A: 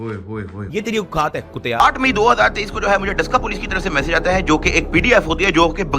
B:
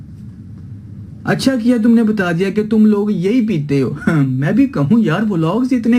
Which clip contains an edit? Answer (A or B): A